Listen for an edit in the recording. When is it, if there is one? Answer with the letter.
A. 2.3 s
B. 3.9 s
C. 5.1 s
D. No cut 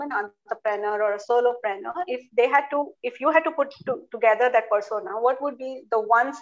D